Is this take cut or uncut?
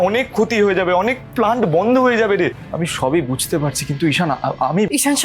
cut